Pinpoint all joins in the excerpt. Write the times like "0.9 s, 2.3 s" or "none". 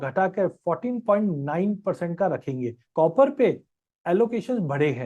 2.8 s

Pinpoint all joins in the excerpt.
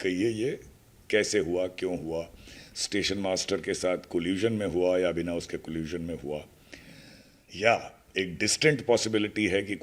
none

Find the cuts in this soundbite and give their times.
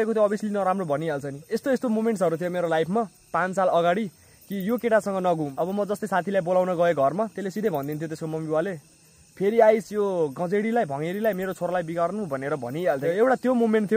1.6 s, 5.5 s, 13.0 s

